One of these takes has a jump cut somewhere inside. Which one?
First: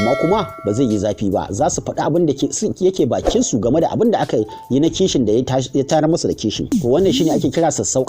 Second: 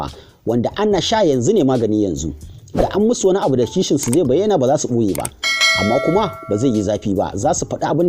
first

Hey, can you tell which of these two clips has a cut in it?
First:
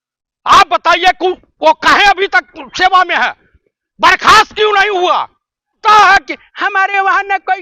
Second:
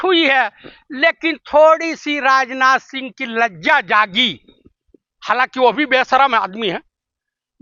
first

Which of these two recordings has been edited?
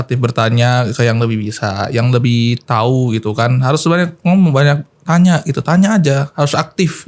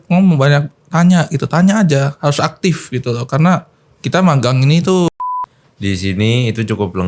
second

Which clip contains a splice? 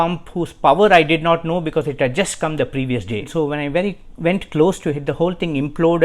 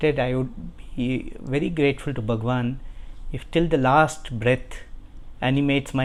first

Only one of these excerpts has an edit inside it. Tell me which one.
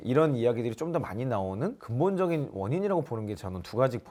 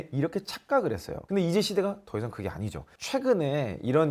second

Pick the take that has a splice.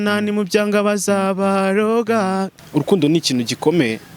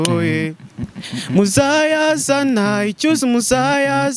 first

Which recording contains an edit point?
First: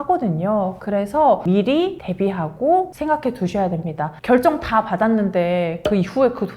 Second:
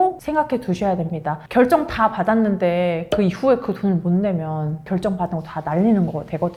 first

